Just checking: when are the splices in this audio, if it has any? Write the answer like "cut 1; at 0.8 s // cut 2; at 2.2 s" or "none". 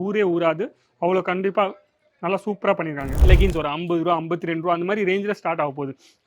cut 1; at 3.1 s